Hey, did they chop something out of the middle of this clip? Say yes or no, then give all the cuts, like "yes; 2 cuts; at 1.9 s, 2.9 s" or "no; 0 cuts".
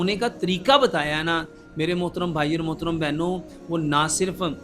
no; 0 cuts